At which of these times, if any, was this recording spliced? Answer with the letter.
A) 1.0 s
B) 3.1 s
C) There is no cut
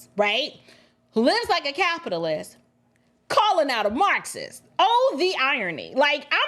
C